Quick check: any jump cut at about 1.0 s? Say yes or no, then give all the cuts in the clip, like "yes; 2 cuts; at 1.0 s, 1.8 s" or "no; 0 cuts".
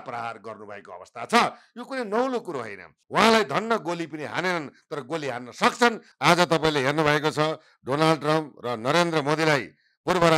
no; 2 cuts; at 3.0 s, 6.1 s